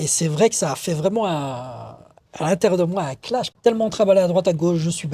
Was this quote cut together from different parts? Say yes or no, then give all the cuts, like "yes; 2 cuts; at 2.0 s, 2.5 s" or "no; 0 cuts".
yes; 1 cut; at 3.5 s